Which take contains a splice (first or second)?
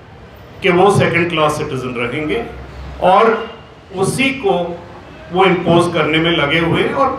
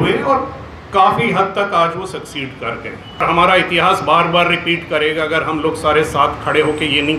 second